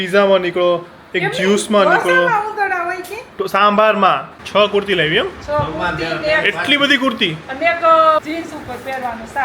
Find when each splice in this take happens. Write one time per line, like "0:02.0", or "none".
0:04.3
0:08.2